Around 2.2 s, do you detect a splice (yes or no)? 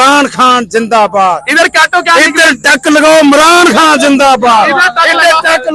no